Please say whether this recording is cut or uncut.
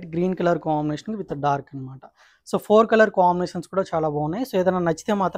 uncut